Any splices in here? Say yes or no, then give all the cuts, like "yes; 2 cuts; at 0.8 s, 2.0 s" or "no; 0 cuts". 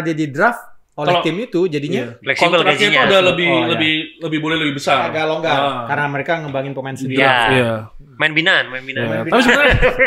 no; 0 cuts